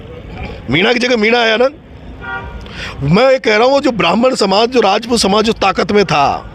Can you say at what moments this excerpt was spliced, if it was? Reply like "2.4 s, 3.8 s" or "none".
none